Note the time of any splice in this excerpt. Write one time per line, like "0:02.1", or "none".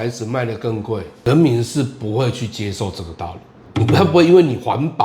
0:01.1
0:03.6